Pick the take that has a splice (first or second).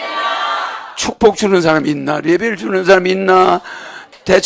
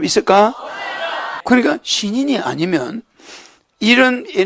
second